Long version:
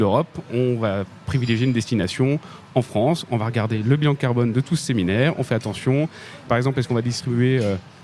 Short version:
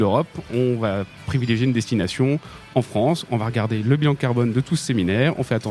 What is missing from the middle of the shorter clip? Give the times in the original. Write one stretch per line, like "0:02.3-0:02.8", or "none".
none